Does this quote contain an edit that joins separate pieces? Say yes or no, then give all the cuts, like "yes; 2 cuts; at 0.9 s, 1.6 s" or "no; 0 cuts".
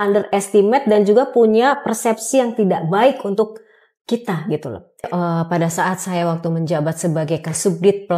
yes; 1 cut; at 5.1 s